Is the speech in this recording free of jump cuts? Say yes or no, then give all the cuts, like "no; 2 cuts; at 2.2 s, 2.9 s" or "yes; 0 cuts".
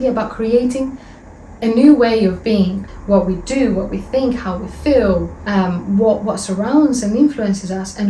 no; 2 cuts; at 2.9 s, 5.4 s